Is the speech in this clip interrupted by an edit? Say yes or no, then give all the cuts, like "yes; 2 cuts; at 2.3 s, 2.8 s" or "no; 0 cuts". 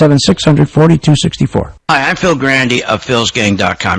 yes; 1 cut; at 1.8 s